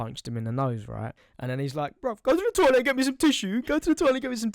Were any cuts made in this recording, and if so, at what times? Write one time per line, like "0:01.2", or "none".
0:01.2